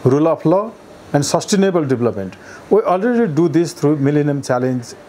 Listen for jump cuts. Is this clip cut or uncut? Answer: uncut